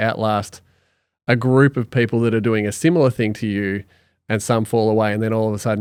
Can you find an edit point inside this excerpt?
no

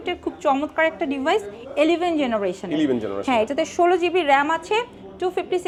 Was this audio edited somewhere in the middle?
no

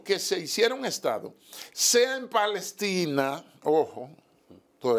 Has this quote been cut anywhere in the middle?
no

